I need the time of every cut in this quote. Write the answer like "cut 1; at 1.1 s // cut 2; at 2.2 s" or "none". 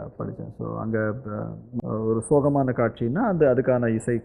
cut 1; at 1.6 s